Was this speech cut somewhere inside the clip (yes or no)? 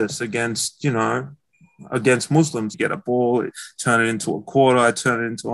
yes